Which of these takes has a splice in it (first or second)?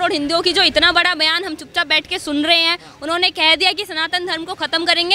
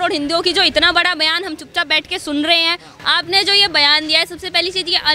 second